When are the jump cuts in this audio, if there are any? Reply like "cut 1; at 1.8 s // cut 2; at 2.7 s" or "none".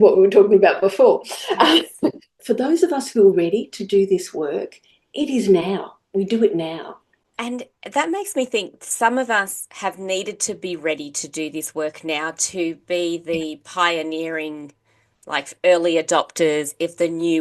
cut 1; at 2.4 s